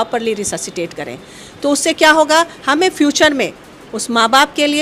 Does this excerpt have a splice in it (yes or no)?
no